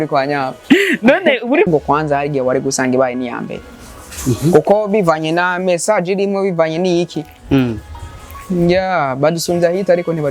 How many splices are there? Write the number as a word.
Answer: one